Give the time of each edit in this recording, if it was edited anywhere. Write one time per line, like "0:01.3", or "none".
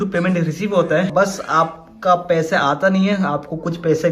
0:01.1